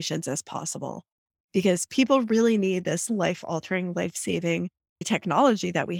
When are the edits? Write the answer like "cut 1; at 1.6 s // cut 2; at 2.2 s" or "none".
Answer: cut 1; at 5.0 s